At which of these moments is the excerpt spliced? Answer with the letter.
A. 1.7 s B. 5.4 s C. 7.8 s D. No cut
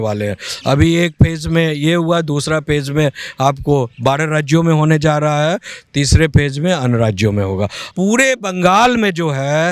C